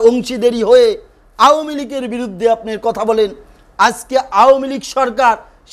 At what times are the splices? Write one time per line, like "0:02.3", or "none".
none